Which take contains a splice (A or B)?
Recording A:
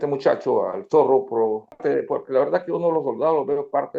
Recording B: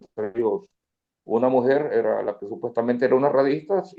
A